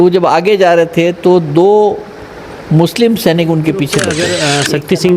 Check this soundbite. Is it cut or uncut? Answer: cut